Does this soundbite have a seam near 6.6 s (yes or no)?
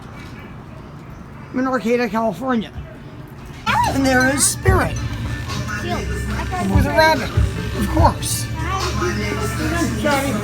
no